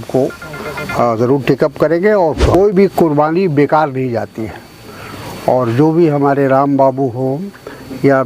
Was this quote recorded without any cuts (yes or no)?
no